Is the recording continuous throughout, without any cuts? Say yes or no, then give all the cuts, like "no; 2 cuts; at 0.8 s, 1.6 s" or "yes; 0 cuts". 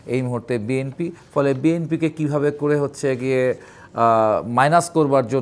no; 1 cut; at 1.2 s